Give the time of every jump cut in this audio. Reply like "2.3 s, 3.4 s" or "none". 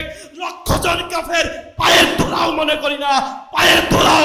none